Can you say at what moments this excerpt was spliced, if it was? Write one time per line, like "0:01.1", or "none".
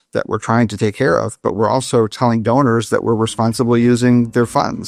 none